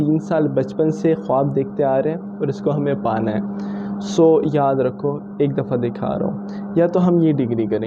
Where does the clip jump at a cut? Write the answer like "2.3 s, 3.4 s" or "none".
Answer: none